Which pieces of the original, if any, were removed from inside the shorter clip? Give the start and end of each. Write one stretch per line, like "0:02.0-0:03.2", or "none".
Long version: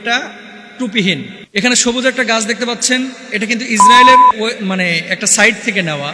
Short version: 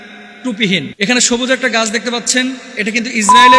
0:01.3-0:01.5